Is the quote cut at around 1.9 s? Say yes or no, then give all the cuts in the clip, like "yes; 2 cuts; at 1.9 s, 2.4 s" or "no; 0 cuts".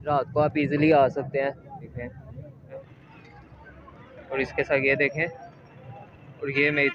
yes; 2 cuts; at 1.9 s, 2.9 s